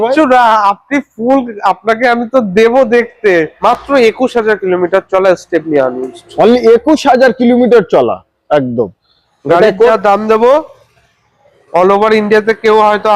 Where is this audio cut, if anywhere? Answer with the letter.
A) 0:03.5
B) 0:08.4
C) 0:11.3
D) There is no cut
A